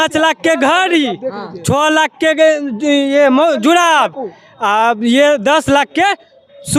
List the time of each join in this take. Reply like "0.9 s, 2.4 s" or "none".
none